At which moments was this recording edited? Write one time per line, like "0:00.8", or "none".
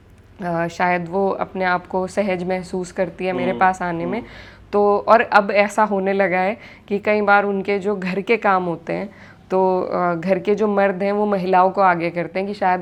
none